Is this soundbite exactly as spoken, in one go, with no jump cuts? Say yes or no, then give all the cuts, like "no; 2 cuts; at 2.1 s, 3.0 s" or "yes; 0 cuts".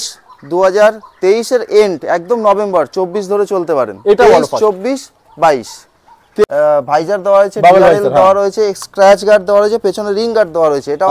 no; 1 cut; at 6.4 s